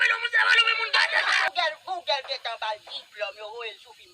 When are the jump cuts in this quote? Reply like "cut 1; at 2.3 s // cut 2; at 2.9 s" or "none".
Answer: cut 1; at 1.4 s